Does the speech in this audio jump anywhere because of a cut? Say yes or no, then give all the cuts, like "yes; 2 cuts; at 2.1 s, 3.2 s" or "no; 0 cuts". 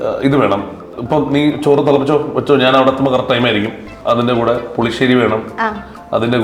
yes; 2 cuts; at 0.9 s, 3.9 s